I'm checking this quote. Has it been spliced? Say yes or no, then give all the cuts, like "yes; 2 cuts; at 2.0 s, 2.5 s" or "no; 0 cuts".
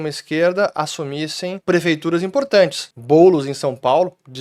yes; 2 cuts; at 1.6 s, 2.9 s